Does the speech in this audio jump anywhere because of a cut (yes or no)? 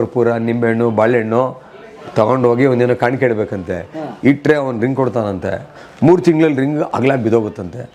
no